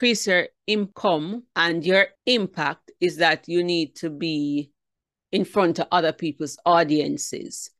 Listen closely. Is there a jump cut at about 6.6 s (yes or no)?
no